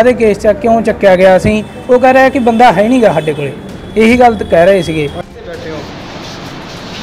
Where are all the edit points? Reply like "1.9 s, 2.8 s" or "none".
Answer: 5.2 s